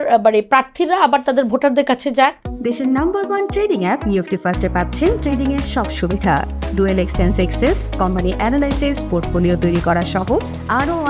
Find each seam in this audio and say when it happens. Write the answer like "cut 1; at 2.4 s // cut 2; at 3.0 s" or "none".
cut 1; at 2.5 s